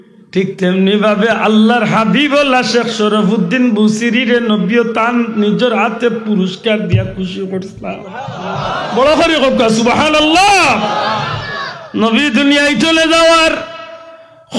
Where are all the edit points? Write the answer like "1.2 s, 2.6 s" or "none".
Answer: none

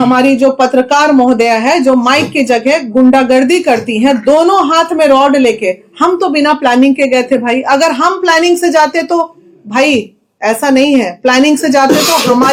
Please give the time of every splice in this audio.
none

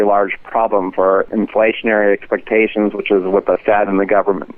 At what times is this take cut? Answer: 1.3 s

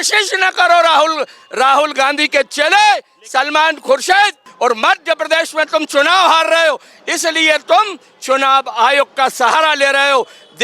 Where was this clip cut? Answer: 4.4 s

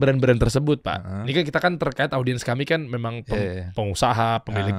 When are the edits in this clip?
none

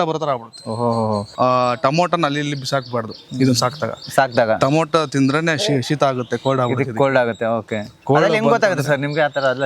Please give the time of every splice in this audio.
1.3 s

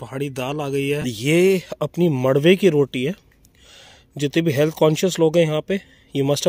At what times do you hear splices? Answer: 1.0 s

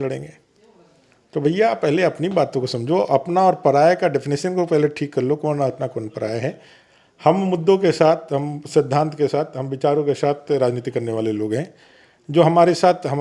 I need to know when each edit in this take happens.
none

